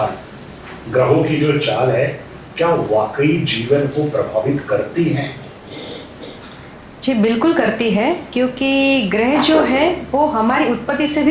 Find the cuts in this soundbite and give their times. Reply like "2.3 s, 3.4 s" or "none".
none